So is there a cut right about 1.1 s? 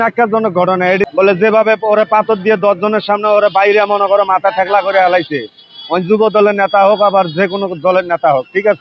yes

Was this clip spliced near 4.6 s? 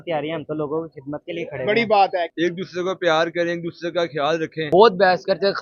yes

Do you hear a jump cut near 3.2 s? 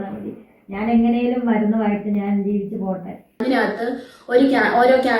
yes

